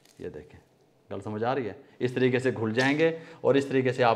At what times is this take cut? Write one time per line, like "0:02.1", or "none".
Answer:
none